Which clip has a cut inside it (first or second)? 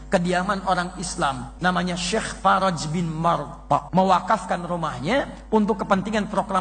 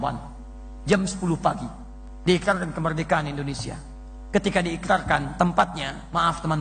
first